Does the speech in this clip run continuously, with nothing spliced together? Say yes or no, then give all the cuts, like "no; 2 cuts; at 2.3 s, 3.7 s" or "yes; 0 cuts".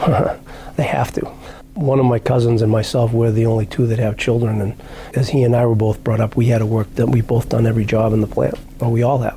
yes; 0 cuts